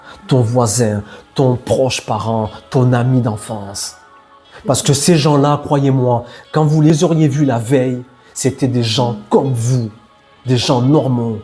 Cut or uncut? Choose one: cut